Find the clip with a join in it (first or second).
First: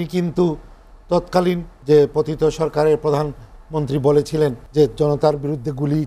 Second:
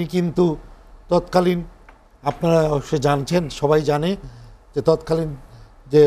first